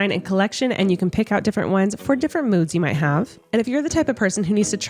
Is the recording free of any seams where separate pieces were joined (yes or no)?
no